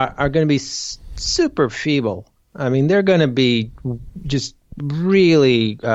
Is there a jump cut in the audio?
no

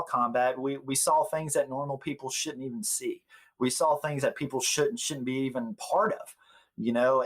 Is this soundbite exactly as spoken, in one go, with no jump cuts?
yes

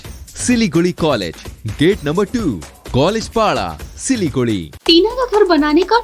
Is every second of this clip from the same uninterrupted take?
no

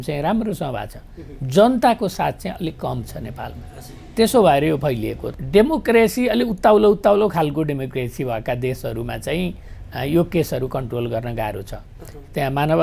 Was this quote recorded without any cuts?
no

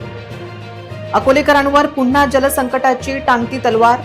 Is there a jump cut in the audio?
yes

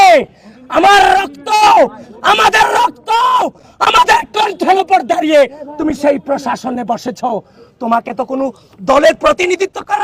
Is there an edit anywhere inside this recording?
no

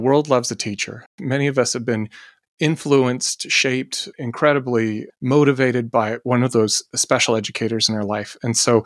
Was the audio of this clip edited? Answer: yes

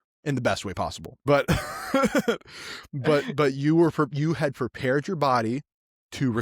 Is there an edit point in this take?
yes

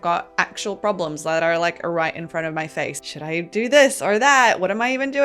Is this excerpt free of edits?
no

